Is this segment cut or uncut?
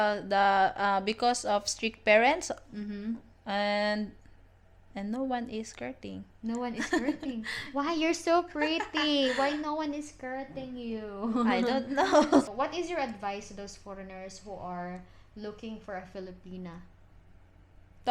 cut